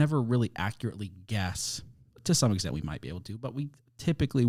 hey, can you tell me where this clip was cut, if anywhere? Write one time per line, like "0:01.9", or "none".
none